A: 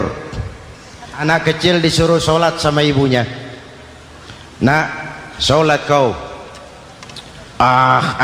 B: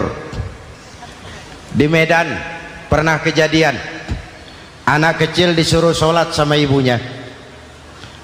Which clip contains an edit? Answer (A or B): A